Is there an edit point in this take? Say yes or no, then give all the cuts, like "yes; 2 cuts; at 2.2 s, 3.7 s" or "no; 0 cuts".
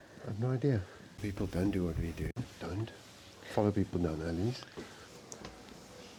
no; 0 cuts